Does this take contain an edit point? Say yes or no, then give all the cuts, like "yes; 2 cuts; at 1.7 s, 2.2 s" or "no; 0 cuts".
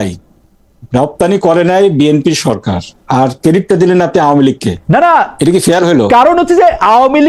no; 0 cuts